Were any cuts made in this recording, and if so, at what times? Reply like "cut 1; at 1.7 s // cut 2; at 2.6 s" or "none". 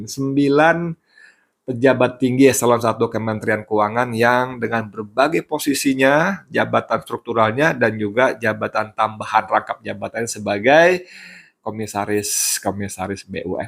none